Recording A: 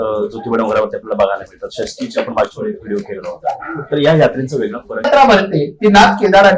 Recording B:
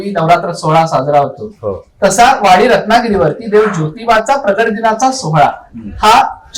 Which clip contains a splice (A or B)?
A